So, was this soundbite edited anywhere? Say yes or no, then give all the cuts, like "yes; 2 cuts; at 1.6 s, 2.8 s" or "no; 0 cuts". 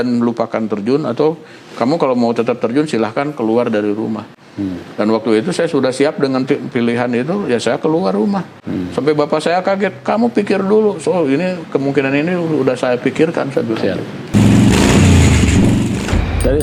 no; 0 cuts